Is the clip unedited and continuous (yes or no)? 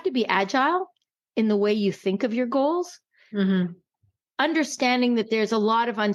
yes